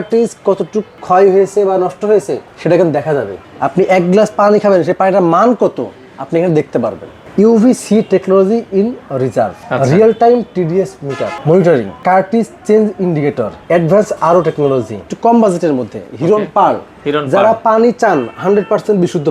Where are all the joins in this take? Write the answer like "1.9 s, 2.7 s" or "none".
1.0 s, 3.4 s, 7.2 s, 9.6 s, 11.3 s, 12.0 s, 13.5 s, 15.0 s